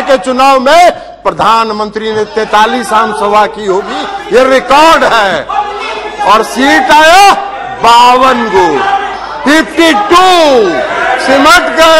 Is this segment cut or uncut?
uncut